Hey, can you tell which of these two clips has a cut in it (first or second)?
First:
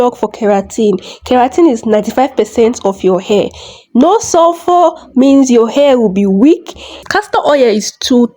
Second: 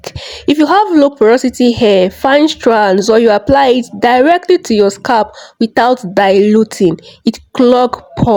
first